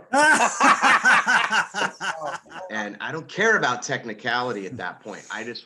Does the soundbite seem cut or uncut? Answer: cut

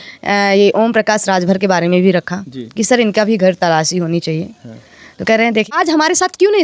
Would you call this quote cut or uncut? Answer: cut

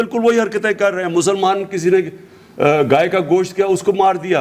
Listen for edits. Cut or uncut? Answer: uncut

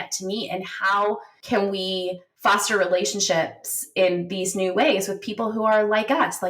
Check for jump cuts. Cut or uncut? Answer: cut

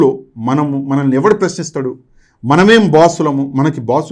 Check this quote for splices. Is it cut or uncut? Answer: uncut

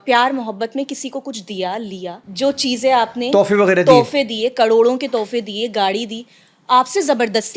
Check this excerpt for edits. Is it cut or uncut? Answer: uncut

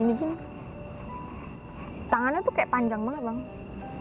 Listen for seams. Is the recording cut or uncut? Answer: cut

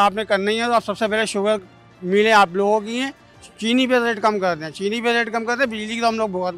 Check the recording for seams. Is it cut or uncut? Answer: uncut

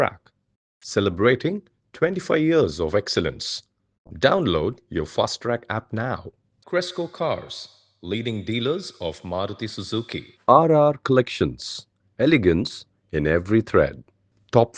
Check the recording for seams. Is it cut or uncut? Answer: uncut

